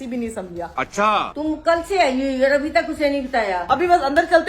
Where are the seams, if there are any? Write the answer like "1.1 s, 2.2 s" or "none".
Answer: 1.2 s, 3.6 s

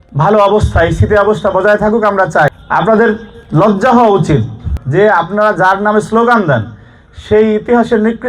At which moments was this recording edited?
2.5 s, 4.7 s

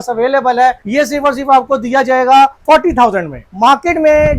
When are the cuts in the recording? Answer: 0.8 s, 2.6 s, 3.4 s

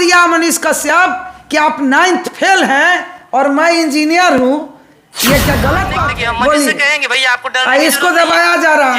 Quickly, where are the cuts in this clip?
6.0 s

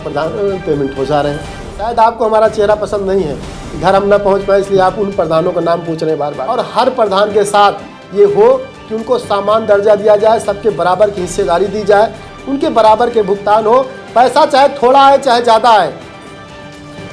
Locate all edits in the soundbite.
1.8 s, 6.4 s

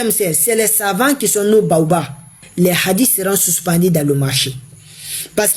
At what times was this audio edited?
2.4 s

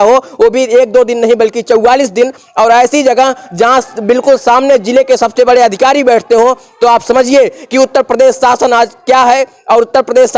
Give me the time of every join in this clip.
none

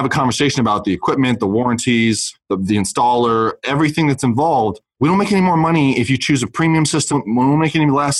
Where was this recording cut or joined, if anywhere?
none

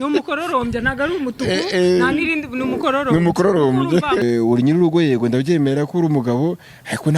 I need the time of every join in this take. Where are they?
4.2 s

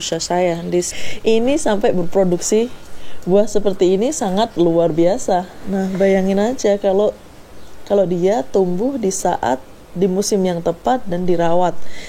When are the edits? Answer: 0.9 s, 5.6 s

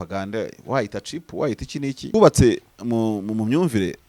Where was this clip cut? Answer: 2.1 s

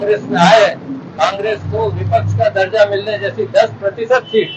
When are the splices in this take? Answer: none

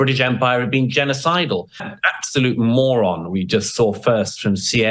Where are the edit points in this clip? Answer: 1.9 s

